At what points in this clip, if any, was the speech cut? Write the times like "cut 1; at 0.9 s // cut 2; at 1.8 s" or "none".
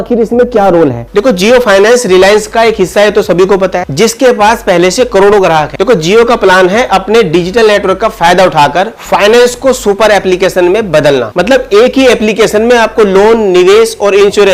none

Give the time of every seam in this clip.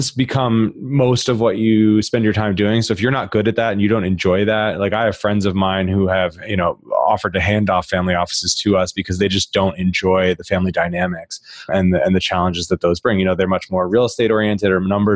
none

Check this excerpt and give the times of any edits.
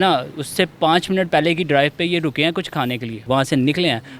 cut 1; at 3.2 s

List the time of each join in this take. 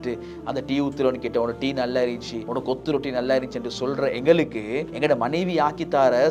cut 1; at 2.4 s // cut 2; at 4.9 s

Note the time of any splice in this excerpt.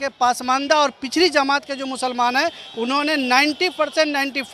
none

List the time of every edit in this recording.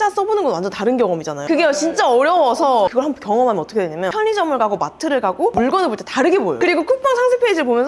none

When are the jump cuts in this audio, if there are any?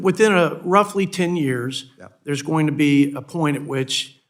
none

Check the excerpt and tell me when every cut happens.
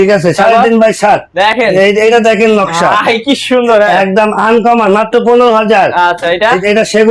none

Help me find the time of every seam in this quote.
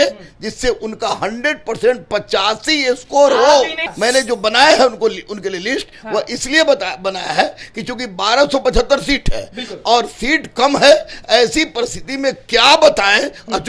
cut 1; at 3.8 s

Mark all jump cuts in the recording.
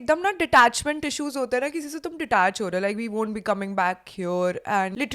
none

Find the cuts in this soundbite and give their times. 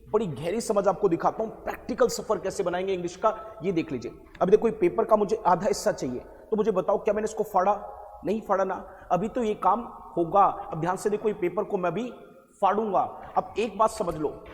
none

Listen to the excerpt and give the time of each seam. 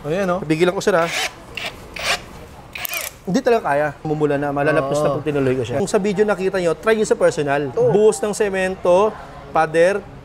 cut 1; at 4.1 s // cut 2; at 5.8 s // cut 3; at 7.7 s

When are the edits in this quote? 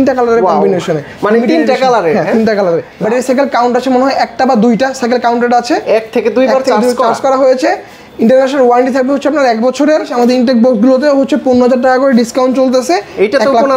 cut 1; at 2.9 s // cut 2; at 10.1 s

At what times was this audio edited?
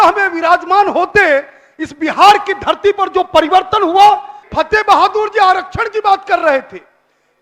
cut 1; at 4.4 s

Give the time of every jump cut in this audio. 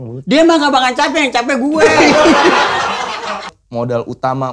cut 1; at 3.6 s

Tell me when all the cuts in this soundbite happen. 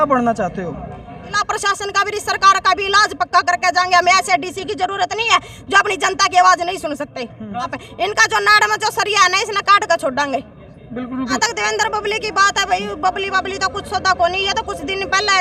cut 1; at 1.4 s // cut 2; at 7.8 s // cut 3; at 11.4 s

